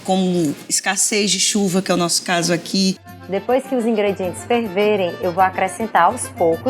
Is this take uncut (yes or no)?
no